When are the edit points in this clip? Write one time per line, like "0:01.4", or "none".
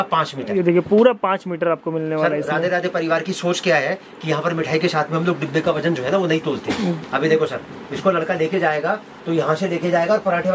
none